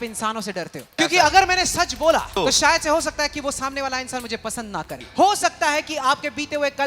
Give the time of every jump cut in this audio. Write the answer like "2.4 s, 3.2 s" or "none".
0.9 s, 2.3 s, 5.0 s